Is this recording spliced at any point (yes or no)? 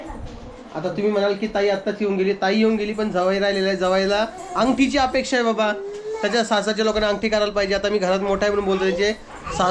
no